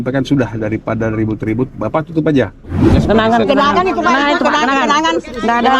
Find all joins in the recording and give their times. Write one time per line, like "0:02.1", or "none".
0:02.9